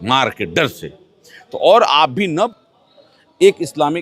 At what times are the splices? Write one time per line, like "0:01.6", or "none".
0:02.5

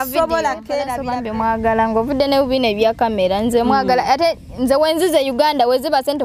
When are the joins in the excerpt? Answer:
0:01.1

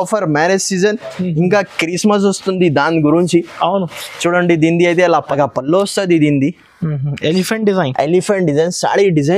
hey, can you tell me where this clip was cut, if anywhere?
0:05.3

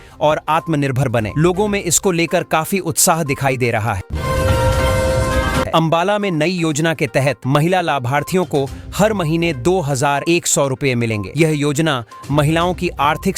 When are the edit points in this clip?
0:04.1
0:05.7

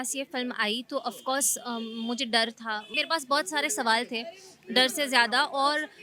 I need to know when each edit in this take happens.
none

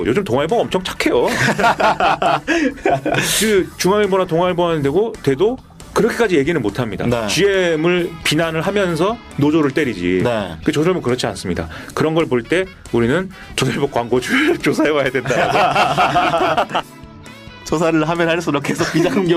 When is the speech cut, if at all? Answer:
0:17.2

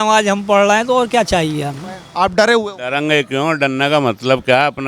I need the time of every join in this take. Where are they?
0:02.1

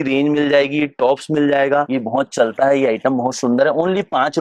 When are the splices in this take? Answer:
0:01.9

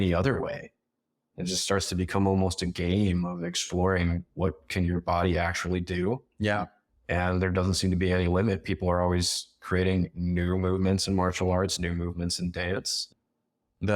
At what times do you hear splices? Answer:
0:13.0

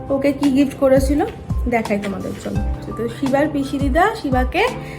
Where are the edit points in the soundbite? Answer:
0:02.8

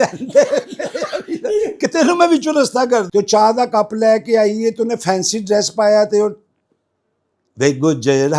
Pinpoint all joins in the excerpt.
0:03.1

